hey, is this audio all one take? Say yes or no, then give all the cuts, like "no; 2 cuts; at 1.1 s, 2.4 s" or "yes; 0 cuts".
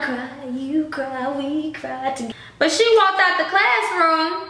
no; 1 cut; at 2.3 s